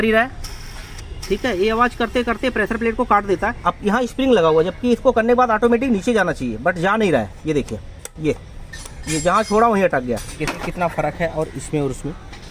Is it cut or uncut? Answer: cut